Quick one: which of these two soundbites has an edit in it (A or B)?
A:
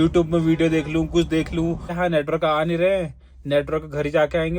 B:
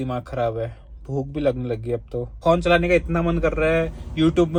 A